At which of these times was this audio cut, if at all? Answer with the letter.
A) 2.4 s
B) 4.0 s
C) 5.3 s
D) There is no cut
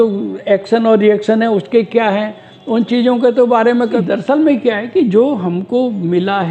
B